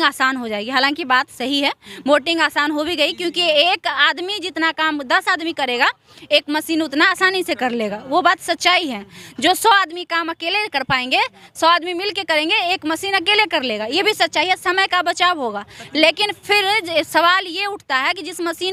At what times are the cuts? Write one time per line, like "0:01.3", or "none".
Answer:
none